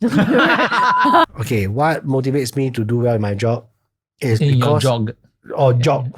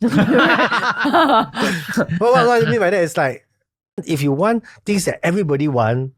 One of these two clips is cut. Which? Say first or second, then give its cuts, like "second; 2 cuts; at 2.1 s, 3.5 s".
first; 1 cut; at 1.2 s